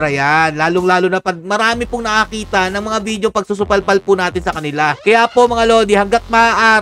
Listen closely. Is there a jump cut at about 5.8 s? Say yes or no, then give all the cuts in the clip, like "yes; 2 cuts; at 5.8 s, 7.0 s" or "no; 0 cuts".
no; 0 cuts